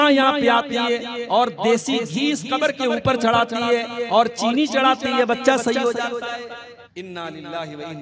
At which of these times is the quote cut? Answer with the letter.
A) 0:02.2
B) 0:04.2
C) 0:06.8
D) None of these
C